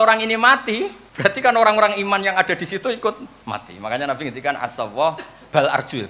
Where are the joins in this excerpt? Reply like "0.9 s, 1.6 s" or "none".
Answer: 1.0 s, 3.3 s